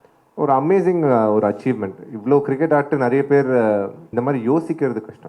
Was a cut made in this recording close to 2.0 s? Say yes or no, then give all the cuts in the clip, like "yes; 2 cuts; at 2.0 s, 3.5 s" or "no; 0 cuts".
no; 1 cut; at 4.0 s